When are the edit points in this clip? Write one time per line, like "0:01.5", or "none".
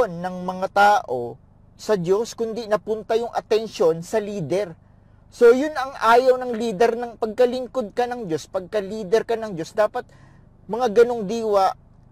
none